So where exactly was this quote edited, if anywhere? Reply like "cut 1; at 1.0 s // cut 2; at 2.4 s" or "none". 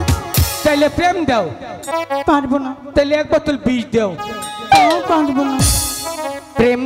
cut 1; at 1.8 s

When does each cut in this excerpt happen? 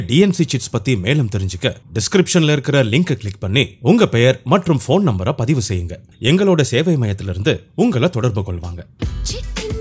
cut 1; at 8.8 s

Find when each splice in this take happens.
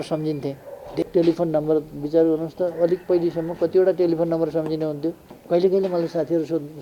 cut 1; at 1.0 s // cut 2; at 5.3 s

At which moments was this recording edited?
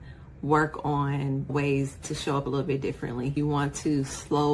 cut 1; at 1.5 s

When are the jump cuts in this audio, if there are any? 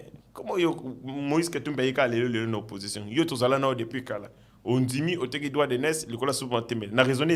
none

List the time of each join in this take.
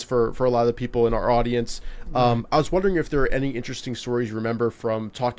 none

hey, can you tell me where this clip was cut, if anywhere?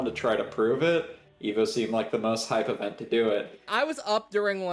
cut 1; at 3.7 s

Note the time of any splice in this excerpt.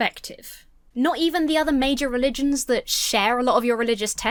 none

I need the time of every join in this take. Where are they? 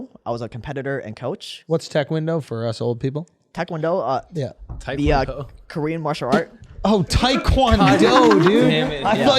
cut 1; at 1.5 s

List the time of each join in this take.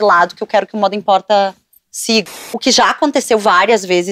cut 1; at 2.2 s

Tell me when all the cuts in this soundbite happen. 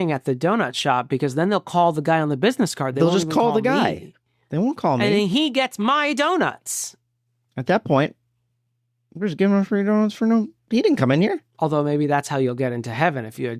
cut 1; at 11.5 s

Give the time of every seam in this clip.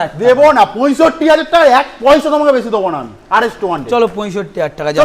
none

